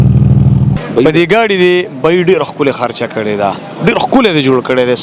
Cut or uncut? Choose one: uncut